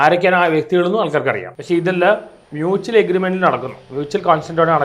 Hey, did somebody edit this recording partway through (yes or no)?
yes